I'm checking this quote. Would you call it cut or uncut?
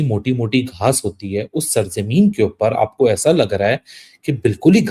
uncut